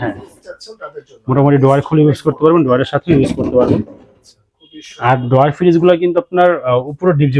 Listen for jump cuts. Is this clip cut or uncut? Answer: uncut